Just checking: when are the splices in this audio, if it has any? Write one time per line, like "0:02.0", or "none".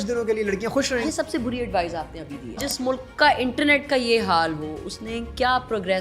0:00.9
0:02.6